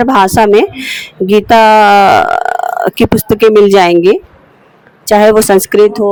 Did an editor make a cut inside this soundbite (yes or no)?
no